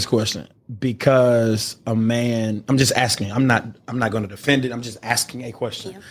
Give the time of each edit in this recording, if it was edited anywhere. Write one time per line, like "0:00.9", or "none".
none